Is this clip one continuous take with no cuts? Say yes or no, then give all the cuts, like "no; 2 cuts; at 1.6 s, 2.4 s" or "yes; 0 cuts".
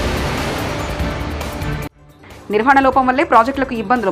no; 1 cut; at 2.0 s